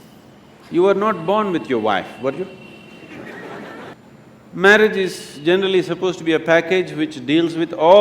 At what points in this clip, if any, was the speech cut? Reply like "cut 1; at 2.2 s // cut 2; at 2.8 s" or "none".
cut 1; at 3.9 s